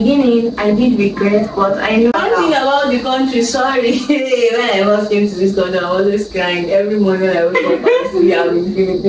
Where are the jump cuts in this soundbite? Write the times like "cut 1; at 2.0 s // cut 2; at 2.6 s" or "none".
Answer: cut 1; at 2.1 s